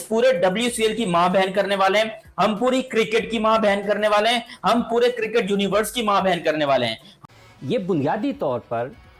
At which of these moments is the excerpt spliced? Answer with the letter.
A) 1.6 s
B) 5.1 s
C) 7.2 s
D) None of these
C